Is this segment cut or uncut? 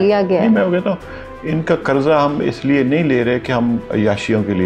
uncut